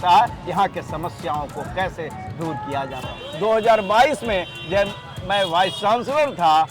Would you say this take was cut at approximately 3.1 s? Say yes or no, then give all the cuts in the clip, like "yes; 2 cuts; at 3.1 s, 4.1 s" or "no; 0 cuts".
yes; 1 cut; at 3.1 s